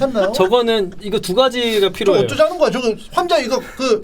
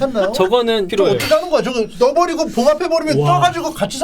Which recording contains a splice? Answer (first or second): second